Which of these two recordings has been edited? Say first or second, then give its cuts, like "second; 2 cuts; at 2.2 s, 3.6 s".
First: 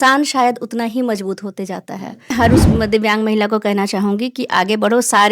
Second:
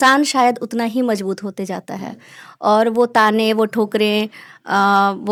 first; 1 cut; at 2.3 s